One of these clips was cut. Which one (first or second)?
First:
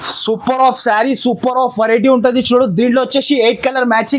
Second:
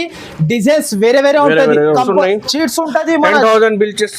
second